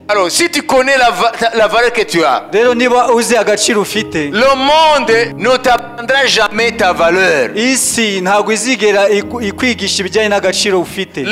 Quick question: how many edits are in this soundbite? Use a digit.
1